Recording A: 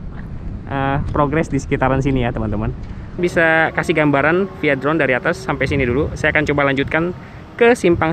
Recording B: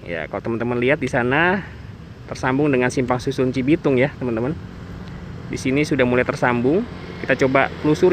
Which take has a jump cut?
A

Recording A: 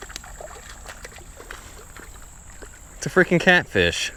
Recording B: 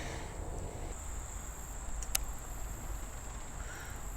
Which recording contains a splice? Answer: B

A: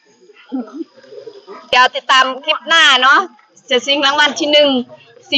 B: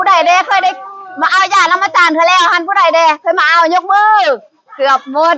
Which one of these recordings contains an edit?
A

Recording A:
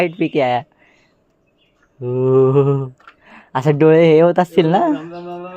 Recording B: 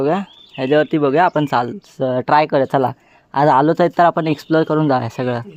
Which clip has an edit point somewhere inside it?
A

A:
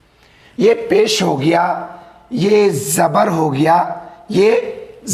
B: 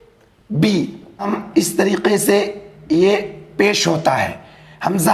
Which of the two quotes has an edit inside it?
B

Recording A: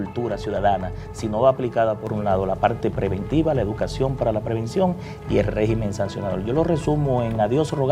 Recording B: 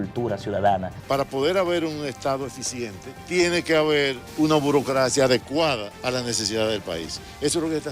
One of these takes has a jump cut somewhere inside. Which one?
B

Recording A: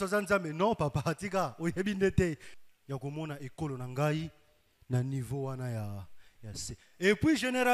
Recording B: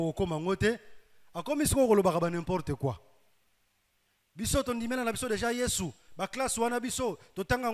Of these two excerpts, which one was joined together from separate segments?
A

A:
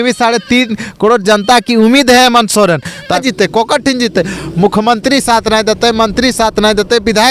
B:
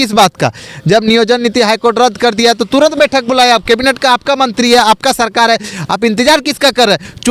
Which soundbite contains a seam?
A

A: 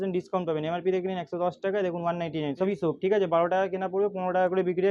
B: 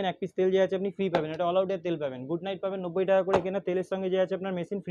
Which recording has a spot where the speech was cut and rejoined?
A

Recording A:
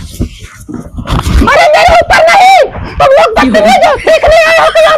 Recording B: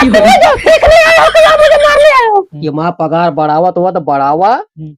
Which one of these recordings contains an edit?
B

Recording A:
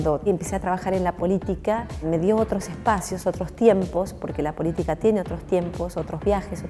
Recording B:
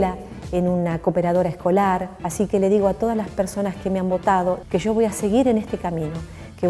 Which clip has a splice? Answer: B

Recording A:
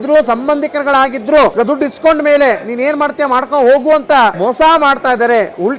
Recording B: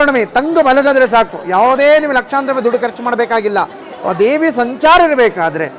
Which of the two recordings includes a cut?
A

